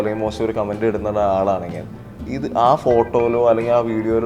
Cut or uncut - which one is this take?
uncut